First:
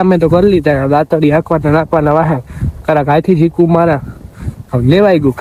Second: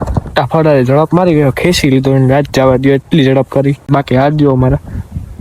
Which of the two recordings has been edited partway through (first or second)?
second